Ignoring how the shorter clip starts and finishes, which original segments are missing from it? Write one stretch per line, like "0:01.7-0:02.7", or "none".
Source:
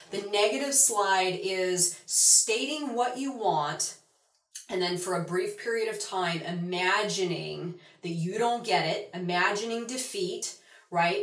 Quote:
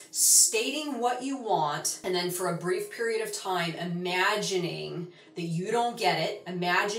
0:03.8-0:04.6